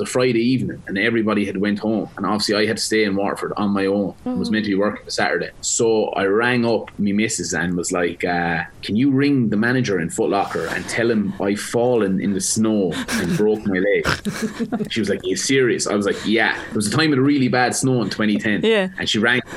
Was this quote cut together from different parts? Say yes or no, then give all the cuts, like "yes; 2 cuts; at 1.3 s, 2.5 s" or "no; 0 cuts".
yes; 5 cuts; at 2.1 s, 4.2 s, 5.6 s, 8.7 s, 14.9 s